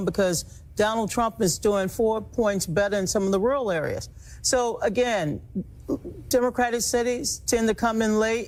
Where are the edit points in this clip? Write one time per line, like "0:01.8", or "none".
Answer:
none